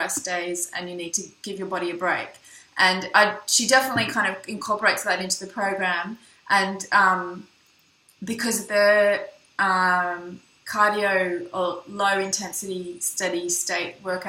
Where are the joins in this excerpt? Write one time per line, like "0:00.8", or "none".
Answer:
none